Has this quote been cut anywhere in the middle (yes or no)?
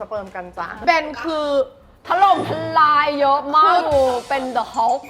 no